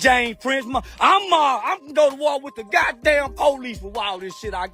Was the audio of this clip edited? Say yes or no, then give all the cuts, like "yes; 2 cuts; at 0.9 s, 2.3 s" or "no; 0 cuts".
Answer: no; 0 cuts